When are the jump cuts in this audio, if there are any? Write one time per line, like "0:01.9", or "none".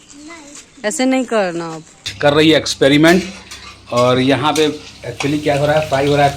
0:02.1